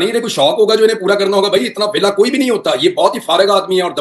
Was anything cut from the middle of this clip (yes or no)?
no